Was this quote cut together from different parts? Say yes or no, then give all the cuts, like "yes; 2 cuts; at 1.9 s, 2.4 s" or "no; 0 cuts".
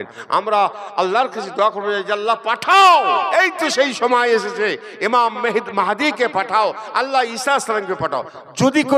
no; 0 cuts